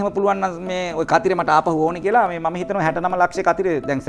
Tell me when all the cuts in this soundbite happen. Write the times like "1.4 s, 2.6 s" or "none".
none